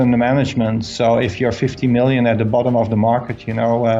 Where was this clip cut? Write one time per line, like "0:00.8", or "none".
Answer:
none